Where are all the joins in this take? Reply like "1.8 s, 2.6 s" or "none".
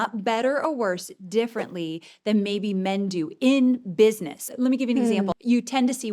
4.5 s, 5.4 s

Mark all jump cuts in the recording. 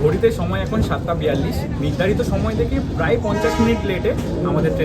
none

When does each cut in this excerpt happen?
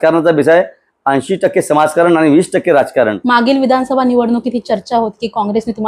3.2 s

